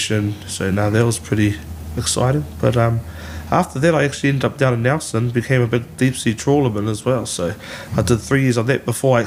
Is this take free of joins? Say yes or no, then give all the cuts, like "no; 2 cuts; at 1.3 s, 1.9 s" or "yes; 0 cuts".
yes; 0 cuts